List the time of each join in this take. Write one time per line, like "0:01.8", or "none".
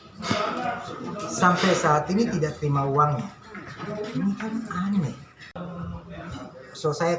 0:05.5